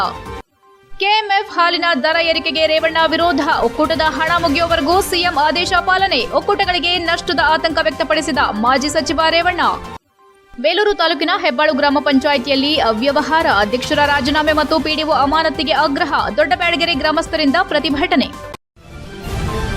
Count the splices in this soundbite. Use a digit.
1